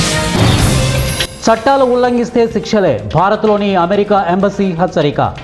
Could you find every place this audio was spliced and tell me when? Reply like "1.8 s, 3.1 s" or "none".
none